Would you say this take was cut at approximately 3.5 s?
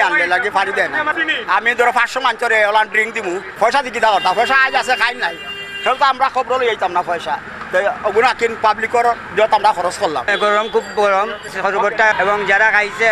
yes; 4 cuts; at 1.1 s, 3.5 s, 10.3 s, 11.7 s

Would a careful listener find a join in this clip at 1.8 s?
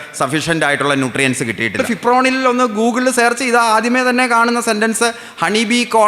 yes; 1 cut; at 1.8 s

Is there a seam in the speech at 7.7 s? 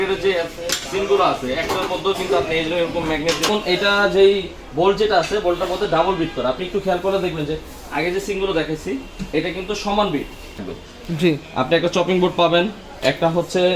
no; 2 cuts; at 3.5 s, 10.7 s

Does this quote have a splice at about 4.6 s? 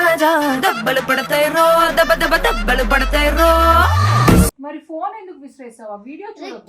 yes; 1 cut; at 4.6 s

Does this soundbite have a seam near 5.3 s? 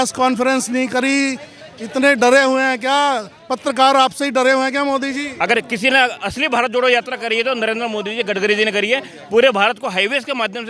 yes; 1 cut; at 5.3 s

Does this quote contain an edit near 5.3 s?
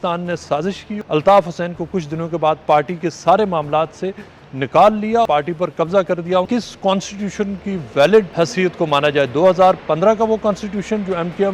yes; 4 cuts; at 0.9 s, 5.3 s, 6.5 s, 8.3 s

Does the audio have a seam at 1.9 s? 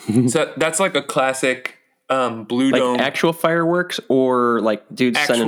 no; 0 cuts

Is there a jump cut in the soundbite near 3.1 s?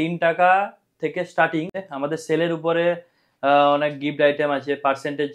no; 1 cut; at 1.8 s

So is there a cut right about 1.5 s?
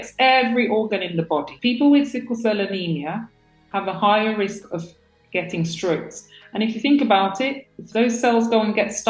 yes; 1 cut; at 1.5 s

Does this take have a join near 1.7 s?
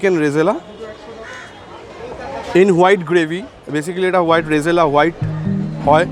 no; 0 cuts

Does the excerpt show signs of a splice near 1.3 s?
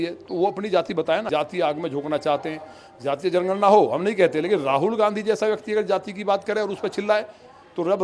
yes; 1 cut; at 1.3 s

